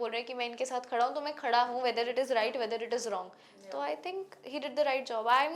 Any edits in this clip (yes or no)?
no